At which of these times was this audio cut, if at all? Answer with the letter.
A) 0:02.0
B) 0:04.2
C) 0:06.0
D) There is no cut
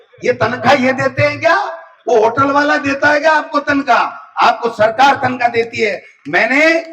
D